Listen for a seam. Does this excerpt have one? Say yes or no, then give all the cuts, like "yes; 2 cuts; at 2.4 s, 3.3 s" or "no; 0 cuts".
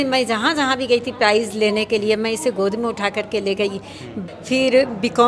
yes; 1 cut; at 4.1 s